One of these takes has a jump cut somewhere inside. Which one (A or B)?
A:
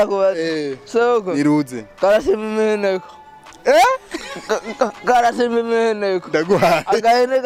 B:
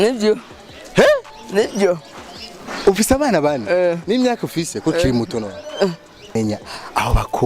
B